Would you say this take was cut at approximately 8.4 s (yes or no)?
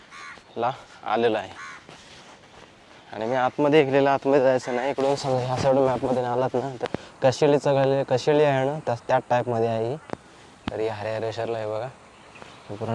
no